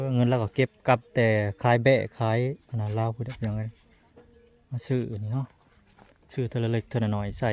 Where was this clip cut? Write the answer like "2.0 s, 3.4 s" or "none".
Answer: none